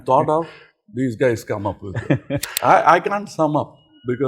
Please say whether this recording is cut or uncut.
cut